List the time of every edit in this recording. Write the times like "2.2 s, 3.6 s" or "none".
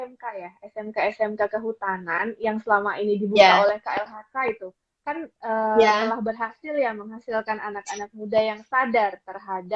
none